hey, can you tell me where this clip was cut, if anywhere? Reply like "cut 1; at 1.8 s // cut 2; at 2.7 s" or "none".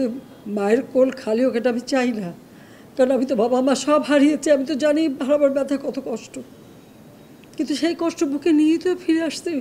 none